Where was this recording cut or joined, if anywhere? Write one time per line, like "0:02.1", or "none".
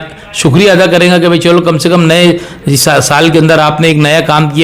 none